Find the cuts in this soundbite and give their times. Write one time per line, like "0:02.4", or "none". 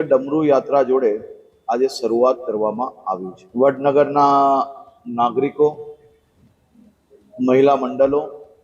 0:03.4